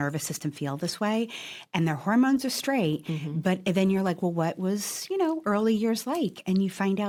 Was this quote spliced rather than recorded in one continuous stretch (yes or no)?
no